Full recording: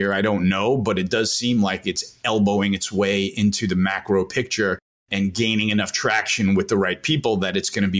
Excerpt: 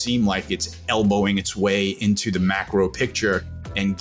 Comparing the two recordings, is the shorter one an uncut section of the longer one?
yes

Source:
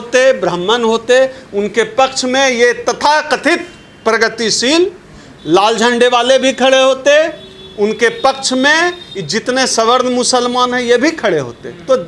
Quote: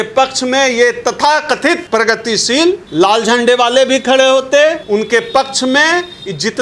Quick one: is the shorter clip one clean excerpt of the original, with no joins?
no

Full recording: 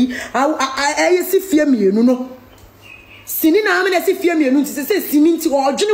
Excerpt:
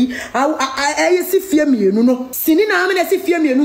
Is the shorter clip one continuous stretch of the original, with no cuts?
no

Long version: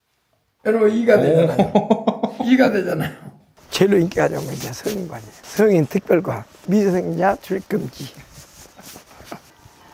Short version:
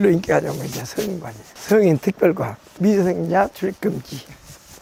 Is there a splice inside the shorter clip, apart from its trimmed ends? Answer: no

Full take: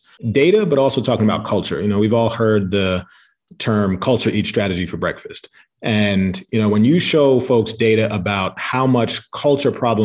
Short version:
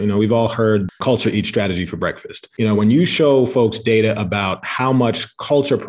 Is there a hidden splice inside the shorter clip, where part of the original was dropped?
yes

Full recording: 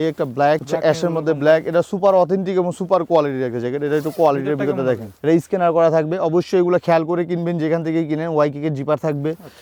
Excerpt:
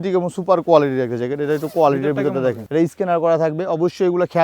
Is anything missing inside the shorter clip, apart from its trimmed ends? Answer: yes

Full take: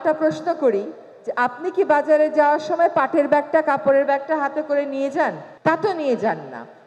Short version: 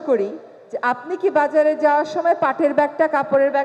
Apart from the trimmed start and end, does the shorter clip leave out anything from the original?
no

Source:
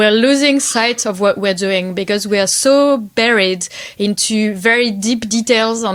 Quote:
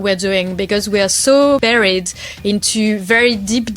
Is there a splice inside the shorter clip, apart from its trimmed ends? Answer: yes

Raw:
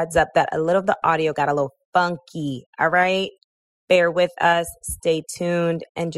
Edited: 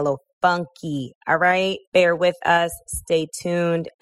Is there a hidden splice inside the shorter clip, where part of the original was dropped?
yes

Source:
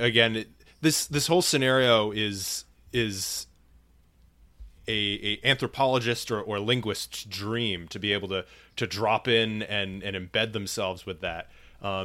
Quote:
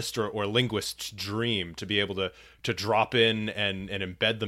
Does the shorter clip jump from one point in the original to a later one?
no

